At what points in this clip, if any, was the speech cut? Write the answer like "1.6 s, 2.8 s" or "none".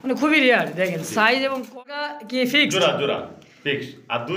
1.8 s